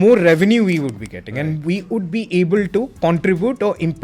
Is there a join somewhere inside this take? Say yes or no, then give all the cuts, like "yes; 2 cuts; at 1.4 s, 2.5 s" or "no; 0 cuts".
yes; 1 cut; at 2.9 s